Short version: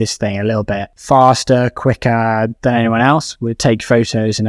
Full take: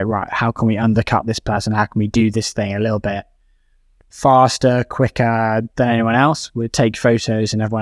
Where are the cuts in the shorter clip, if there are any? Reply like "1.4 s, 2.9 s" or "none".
0.9 s